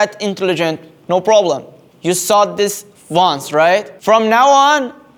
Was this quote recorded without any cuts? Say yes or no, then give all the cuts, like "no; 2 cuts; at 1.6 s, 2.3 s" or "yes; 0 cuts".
yes; 0 cuts